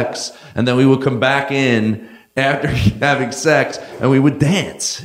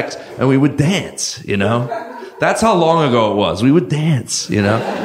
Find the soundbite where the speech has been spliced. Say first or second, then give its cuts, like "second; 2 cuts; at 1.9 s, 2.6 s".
first; 1 cut; at 2.2 s